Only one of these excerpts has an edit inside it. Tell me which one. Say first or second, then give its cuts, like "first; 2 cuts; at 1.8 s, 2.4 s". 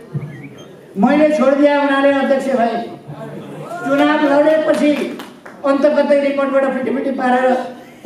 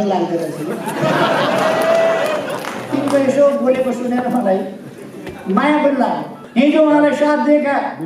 second; 1 cut; at 6.3 s